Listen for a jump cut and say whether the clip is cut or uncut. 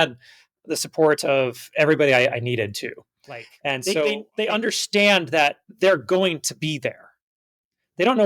cut